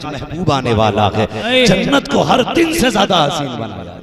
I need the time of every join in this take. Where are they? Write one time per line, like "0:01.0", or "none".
none